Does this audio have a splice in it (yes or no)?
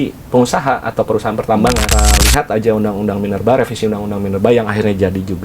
yes